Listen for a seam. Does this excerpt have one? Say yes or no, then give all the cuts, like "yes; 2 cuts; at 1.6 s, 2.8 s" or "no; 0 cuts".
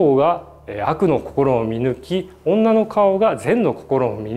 no; 0 cuts